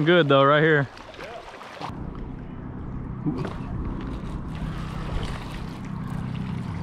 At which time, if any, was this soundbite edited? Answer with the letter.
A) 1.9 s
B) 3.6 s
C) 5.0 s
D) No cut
A